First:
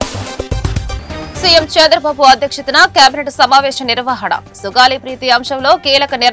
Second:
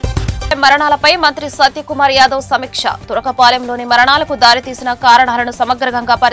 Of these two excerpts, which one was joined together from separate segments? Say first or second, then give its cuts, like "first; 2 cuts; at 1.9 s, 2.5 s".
first; 1 cut; at 0.9 s